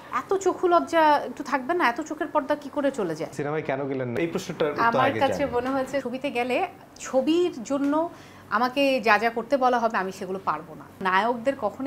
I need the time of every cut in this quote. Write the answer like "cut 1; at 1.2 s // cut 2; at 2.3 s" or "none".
cut 1; at 3.3 s // cut 2; at 6.0 s // cut 3; at 11.0 s